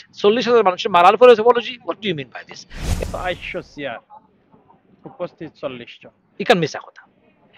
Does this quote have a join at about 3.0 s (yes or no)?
yes